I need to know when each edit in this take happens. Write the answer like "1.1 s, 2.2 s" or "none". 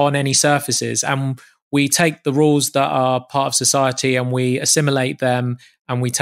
none